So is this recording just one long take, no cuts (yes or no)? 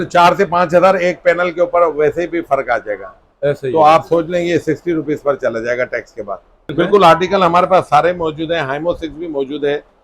no